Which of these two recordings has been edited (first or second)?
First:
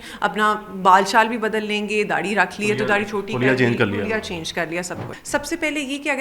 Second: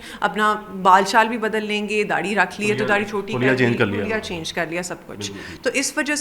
first